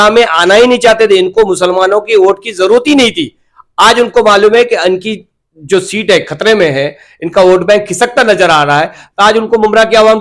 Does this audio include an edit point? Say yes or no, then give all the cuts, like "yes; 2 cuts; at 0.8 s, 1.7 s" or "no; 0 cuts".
no; 0 cuts